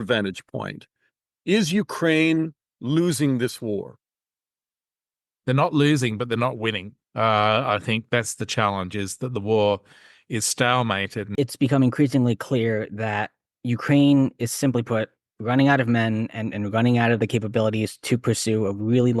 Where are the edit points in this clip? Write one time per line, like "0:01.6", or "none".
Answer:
0:11.3